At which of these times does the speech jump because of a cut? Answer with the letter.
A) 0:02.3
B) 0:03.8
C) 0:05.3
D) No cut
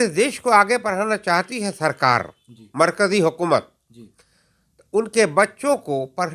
D